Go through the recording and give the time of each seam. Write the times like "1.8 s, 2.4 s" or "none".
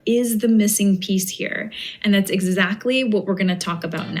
none